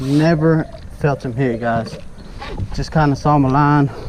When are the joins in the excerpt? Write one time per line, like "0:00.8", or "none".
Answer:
none